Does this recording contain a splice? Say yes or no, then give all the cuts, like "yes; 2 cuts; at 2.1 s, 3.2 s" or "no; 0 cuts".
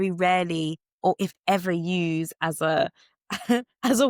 no; 0 cuts